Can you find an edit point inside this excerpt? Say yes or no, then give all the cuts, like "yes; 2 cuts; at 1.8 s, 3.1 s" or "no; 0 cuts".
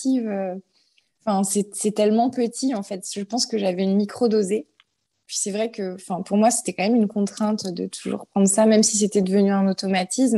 yes; 1 cut; at 5.3 s